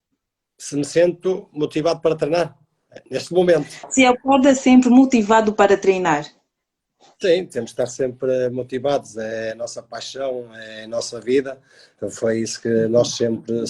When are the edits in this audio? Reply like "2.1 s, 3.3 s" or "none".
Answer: 8.2 s